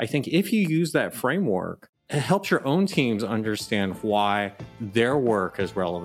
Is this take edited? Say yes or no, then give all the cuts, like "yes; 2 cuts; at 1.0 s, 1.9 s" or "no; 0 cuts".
no; 0 cuts